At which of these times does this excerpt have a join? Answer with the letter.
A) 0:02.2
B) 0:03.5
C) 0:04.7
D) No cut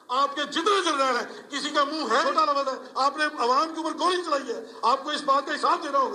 A